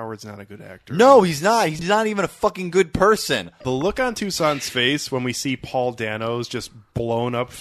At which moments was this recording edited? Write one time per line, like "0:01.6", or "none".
0:01.8
0:03.5

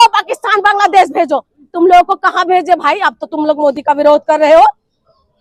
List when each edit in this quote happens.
none

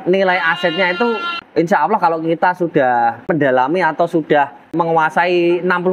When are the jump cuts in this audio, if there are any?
0:01.3
0:03.3
0:04.7

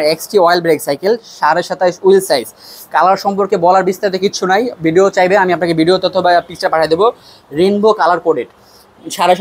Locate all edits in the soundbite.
none

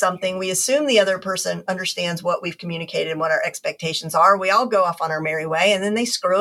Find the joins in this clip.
none

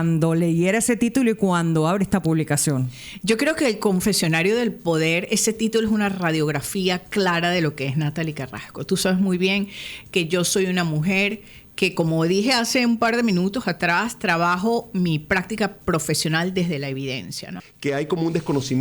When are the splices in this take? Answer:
0:17.4

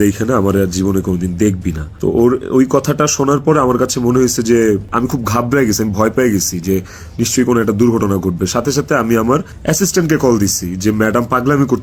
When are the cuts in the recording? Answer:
none

